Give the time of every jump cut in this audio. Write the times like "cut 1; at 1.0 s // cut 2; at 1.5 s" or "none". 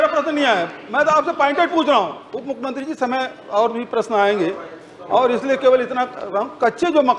none